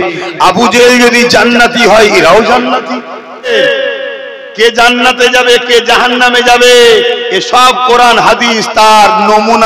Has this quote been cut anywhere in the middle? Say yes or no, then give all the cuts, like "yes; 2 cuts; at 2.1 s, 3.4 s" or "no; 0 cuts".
yes; 1 cut; at 3.5 s